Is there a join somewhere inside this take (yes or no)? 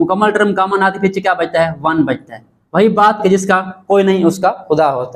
no